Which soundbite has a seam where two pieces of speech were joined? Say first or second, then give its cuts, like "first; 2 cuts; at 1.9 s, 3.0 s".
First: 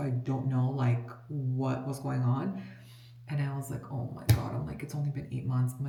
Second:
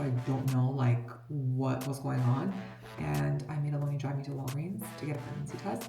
second; 1 cut; at 2.9 s